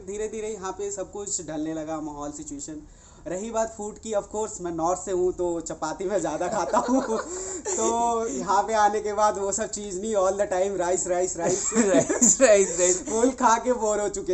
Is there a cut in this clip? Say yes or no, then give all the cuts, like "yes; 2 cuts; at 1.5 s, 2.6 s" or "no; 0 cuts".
no; 0 cuts